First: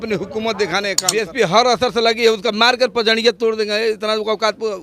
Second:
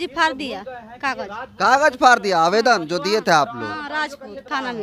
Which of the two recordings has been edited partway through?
first; 1 cut; at 1.0 s

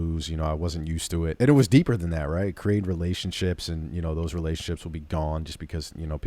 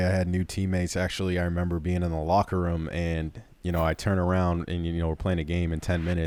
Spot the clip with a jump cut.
first; 1 cut; at 1.3 s

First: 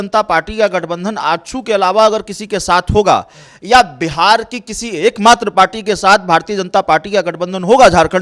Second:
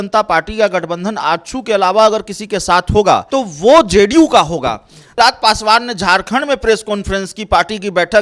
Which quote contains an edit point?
second; 2 cuts; at 3.2 s, 5.1 s

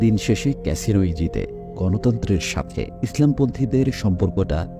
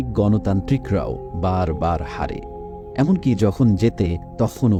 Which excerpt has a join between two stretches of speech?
first; 1 cut; at 1.7 s

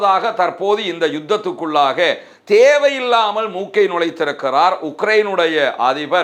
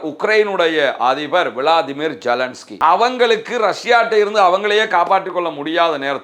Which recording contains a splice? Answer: second; 1 cut; at 2.6 s

